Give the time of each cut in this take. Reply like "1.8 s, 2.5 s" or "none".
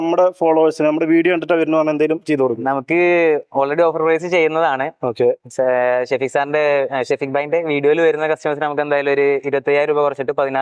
none